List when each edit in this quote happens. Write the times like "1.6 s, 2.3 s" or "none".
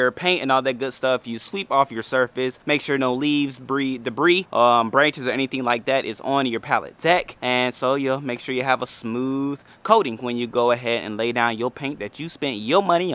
2.6 s, 4.5 s, 7.3 s